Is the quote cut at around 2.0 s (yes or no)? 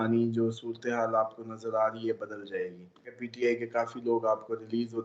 no